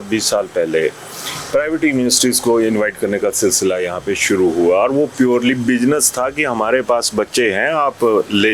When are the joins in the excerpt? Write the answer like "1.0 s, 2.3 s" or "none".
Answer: none

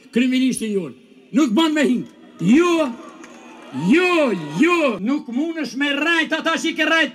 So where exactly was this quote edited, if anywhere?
5.0 s

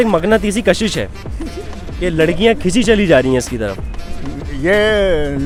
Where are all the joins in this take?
none

